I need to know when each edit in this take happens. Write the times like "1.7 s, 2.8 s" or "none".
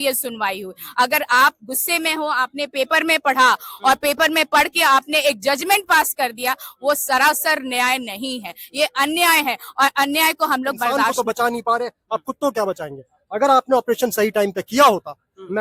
11.1 s

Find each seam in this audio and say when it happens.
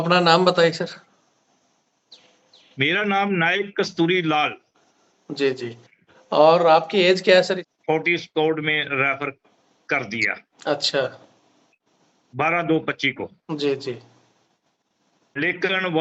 7.7 s

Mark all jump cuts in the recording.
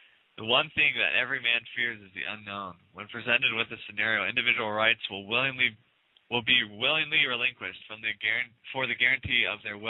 none

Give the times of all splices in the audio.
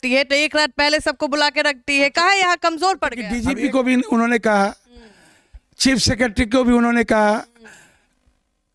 3.3 s

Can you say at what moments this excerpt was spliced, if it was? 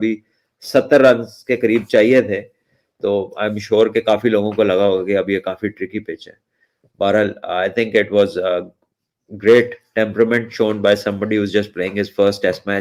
none

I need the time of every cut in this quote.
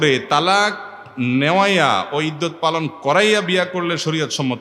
none

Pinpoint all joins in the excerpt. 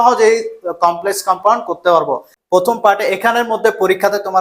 2.3 s

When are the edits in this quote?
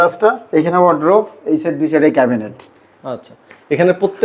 none

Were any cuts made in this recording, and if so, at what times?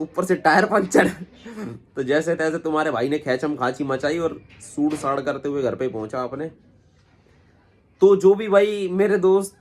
none

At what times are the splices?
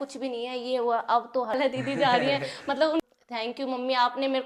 1.5 s, 3.0 s

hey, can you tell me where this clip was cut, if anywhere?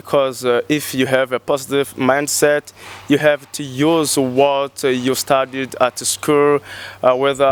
none

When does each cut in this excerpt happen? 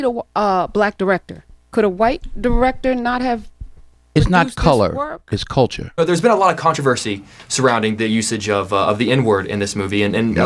5.9 s

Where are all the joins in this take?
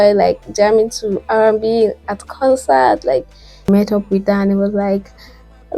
3.7 s

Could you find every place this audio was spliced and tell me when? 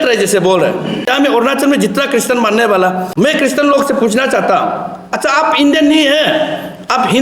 1.1 s, 3.1 s

